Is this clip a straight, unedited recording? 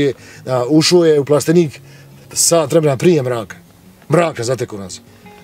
yes; 0 cuts

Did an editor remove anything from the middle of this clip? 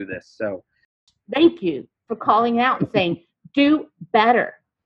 yes; 1 cut; at 1.0 s

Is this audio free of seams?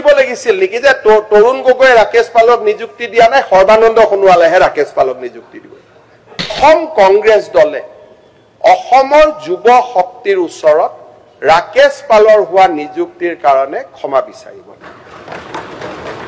no; 1 cut; at 6.6 s

